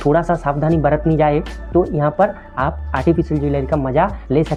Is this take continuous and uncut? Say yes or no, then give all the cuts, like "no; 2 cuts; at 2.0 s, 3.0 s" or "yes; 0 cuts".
yes; 0 cuts